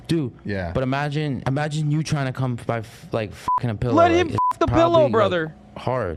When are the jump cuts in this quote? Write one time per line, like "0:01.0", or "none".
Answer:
none